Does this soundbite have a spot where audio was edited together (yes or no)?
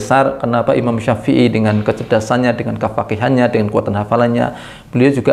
no